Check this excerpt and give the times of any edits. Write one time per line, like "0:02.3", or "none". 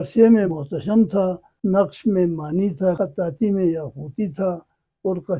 0:01.0
0:03.0